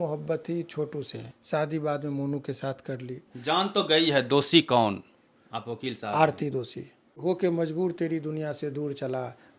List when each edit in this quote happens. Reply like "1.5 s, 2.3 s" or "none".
1.2 s, 3.3 s, 7.2 s